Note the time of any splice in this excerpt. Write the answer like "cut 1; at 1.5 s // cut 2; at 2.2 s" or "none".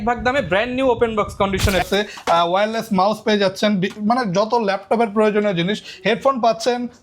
cut 1; at 1.9 s